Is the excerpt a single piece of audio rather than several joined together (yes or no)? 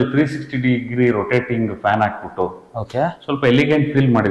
yes